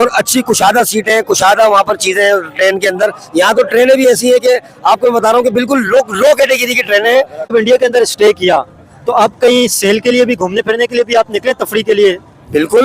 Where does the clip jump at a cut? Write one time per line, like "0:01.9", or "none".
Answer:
0:07.5